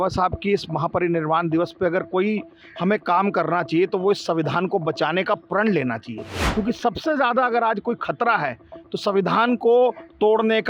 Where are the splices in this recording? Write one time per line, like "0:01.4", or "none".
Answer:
none